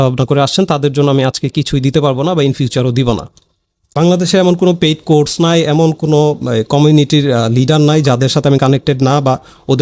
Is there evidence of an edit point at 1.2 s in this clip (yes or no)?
no